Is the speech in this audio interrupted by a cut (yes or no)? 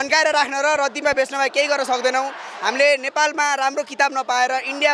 no